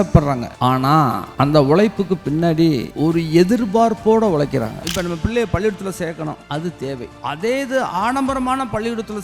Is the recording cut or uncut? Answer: cut